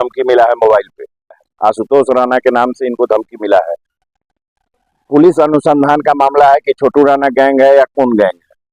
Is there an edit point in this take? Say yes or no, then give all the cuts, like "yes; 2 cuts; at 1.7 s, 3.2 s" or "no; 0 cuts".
yes; 2 cuts; at 1.5 s, 3.8 s